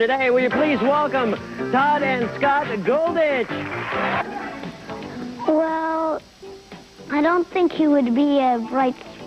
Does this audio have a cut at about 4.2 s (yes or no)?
no